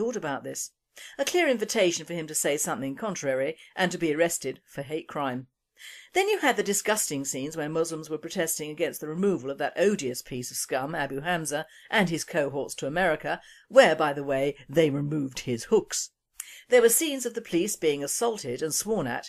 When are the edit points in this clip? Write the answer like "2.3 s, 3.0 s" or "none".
none